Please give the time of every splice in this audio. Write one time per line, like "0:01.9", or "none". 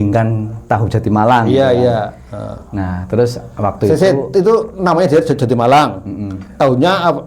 none